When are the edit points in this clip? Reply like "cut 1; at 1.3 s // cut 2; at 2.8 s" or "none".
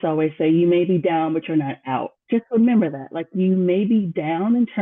none